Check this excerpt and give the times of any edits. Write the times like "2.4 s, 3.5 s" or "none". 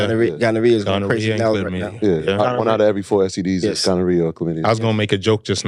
none